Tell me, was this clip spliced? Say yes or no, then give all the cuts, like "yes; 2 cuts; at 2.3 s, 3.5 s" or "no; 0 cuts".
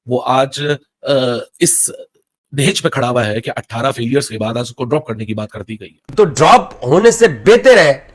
yes; 1 cut; at 6.0 s